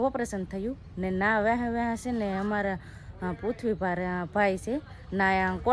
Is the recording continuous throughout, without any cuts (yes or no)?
yes